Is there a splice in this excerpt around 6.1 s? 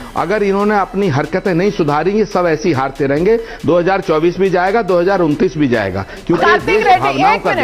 yes; 1 cut; at 6.1 s

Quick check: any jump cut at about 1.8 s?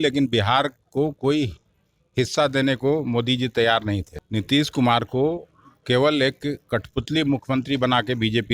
no; 1 cut; at 4.1 s

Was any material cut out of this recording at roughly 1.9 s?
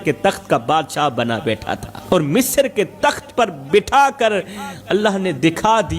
yes; 1 cut; at 1.9 s

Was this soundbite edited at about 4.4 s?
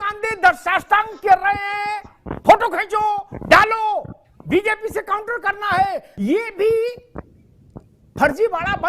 no; 1 cut; at 6.1 s

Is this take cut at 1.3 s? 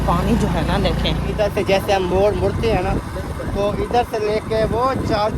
yes; 1 cut; at 1.3 s

